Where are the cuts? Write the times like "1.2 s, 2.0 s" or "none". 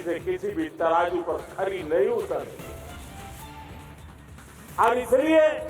2.7 s, 4.4 s